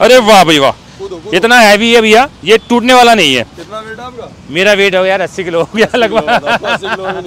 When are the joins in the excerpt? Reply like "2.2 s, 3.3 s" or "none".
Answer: none